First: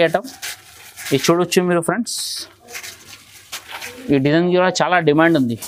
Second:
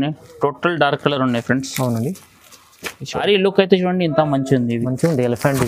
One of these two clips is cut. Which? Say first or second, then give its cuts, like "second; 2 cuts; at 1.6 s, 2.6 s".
second; 1 cut; at 3.2 s